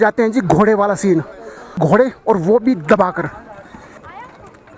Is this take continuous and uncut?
no; 2 cuts; at 1.7 s, 4.0 s

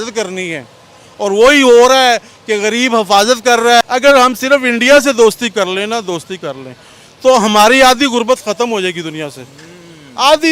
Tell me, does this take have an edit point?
yes; 1 cut; at 3.8 s

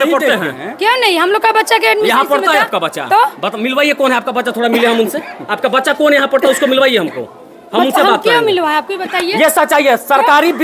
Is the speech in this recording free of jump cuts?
yes; 0 cuts

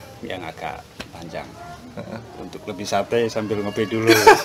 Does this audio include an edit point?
no; 0 cuts

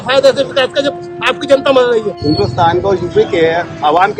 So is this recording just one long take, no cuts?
no; 1 cut; at 2.1 s

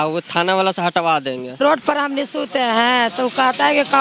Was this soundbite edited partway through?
yes; 1 cut; at 1.6 s

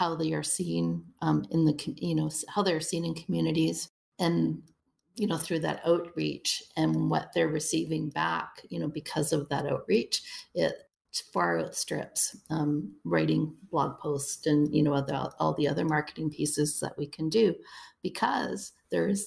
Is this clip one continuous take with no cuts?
yes; 0 cuts

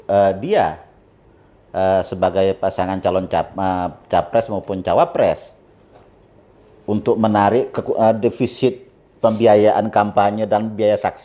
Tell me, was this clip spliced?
no; 0 cuts

